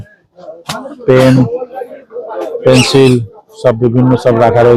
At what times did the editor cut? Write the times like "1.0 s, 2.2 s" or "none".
none